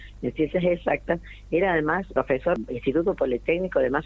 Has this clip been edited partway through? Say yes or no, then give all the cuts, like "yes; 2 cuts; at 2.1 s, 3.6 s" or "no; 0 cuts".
yes; 1 cut; at 2.3 s